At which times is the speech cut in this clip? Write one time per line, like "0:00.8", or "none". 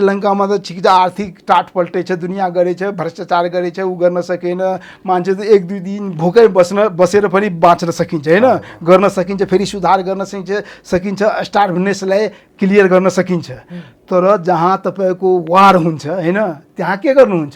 none